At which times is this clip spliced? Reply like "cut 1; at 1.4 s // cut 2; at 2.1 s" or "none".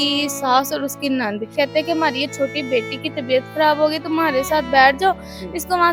cut 1; at 1.5 s